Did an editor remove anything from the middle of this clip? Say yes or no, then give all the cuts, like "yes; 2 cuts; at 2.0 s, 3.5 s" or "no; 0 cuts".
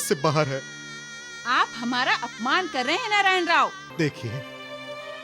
yes; 1 cut; at 3.8 s